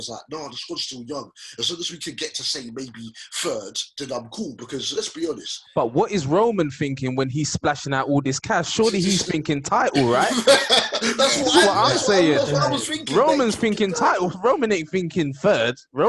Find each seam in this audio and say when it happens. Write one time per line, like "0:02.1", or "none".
none